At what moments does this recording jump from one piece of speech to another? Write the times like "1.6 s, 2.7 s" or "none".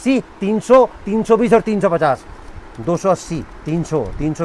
none

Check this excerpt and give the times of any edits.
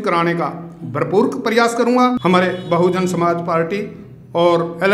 2.2 s

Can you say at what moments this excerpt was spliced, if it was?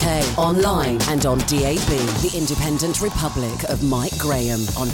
none

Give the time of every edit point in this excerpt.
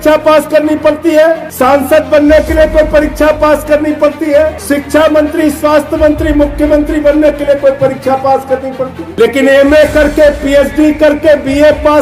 1.5 s, 4.6 s, 9.0 s

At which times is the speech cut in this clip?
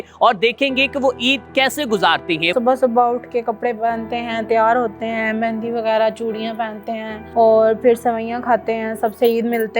2.5 s, 7.2 s

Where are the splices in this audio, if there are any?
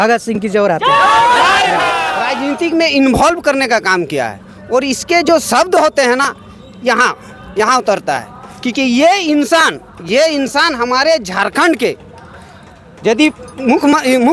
2.2 s

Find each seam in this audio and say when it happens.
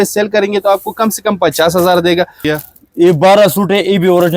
2.4 s

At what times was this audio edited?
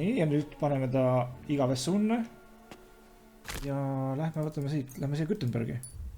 3.5 s

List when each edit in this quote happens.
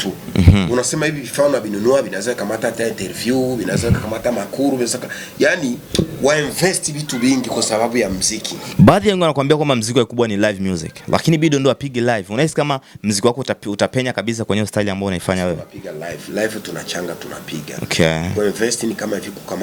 none

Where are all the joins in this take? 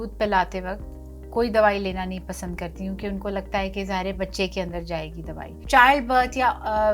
5.6 s

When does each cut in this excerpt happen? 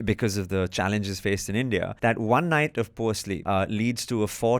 1.9 s, 3.3 s

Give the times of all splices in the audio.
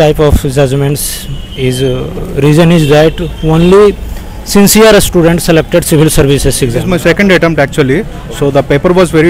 6.8 s

